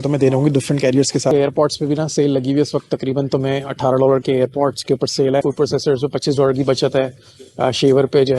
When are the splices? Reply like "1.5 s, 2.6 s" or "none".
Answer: 1.3 s, 5.4 s